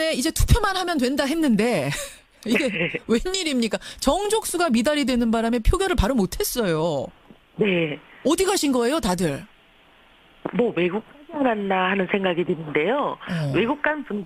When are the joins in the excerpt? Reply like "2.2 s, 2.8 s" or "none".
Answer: 1.6 s

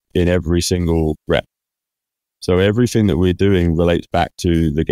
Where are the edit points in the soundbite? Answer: 1.2 s

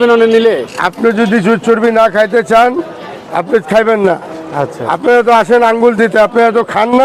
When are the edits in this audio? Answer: none

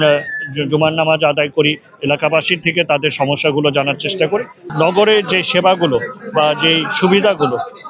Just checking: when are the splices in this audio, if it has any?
4.7 s

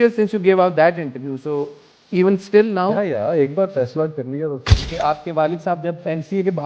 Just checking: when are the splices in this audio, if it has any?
4.8 s

